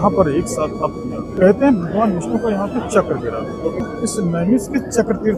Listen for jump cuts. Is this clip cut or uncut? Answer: cut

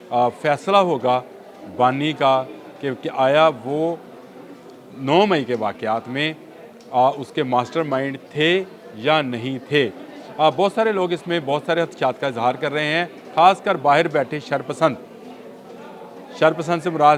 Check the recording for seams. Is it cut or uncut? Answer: uncut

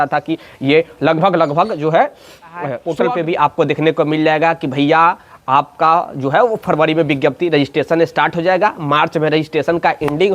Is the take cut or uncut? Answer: cut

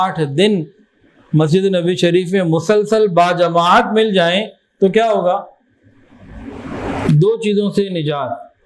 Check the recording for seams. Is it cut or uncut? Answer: uncut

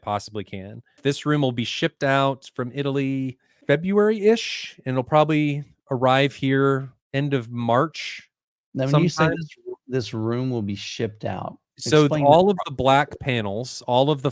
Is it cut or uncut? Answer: cut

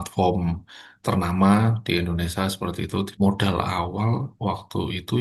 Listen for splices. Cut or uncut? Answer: cut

